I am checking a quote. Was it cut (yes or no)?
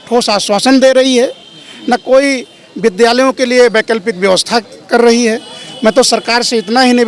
no